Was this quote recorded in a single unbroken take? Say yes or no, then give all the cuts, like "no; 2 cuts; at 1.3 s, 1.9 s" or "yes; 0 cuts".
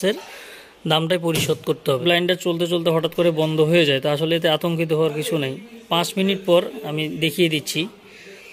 no; 1 cut; at 2.0 s